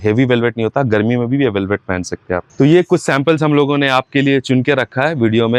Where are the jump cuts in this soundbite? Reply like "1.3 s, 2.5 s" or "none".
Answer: none